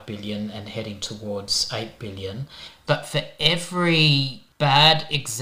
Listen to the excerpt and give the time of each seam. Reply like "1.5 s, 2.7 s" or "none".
2.7 s, 4.4 s